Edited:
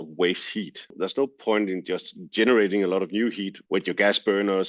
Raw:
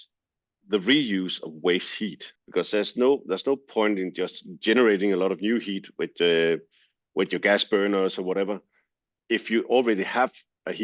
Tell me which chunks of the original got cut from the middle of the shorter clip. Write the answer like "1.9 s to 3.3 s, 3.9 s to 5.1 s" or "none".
2.4 s to 3.2 s, 5.8 s to 7.0 s